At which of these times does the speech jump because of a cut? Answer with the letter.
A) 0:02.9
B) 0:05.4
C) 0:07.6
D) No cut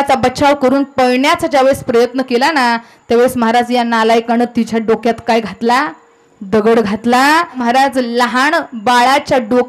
C